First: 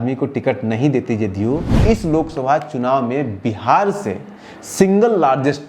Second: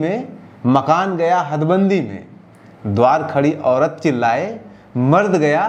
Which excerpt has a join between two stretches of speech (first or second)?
first